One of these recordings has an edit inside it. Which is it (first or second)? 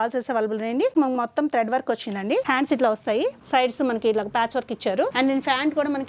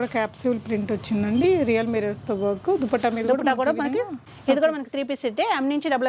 first